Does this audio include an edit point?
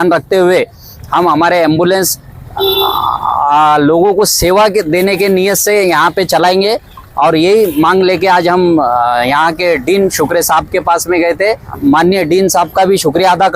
yes; 1 cut; at 11.7 s

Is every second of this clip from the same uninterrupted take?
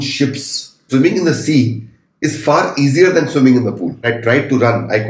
no; 2 cuts; at 0.8 s, 4.0 s

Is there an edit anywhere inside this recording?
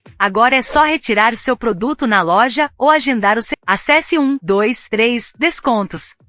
yes; 1 cut; at 3.5 s

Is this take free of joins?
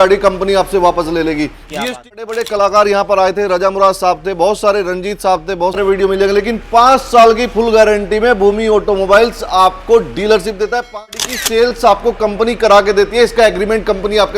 no; 3 cuts; at 2.1 s, 5.8 s, 11.2 s

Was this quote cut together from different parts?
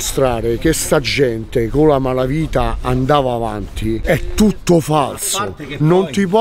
no; 0 cuts

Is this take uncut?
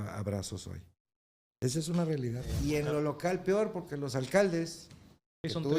no; 1 cut; at 2.5 s

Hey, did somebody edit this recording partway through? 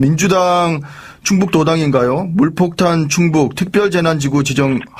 no; 0 cuts

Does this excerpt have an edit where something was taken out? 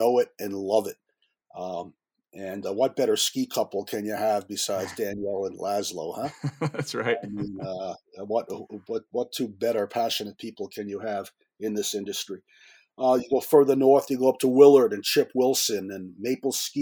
no; 0 cuts

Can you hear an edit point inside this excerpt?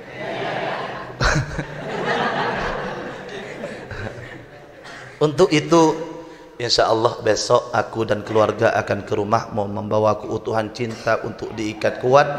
no; 0 cuts

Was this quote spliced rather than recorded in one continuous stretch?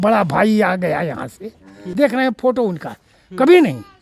yes; 1 cut; at 1.8 s

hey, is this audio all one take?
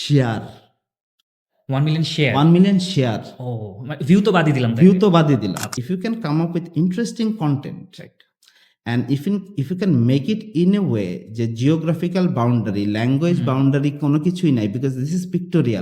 no; 1 cut; at 5.7 s

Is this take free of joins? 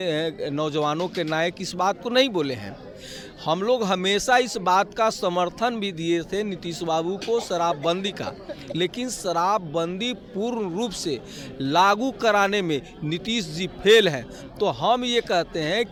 yes; 0 cuts

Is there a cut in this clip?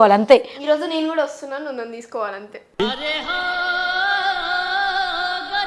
no; 0 cuts

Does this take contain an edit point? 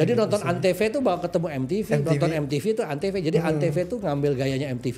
no; 0 cuts

